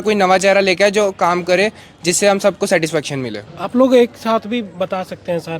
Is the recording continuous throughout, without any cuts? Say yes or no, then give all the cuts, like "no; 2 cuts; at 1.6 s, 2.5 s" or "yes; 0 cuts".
yes; 0 cuts